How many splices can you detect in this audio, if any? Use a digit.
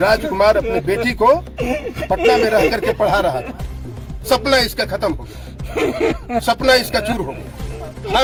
0